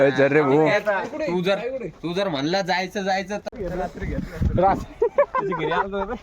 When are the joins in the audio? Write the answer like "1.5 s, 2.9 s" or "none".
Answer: 3.5 s